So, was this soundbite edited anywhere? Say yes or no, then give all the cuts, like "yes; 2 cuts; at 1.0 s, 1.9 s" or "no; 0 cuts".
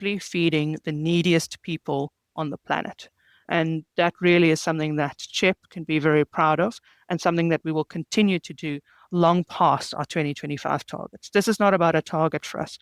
no; 0 cuts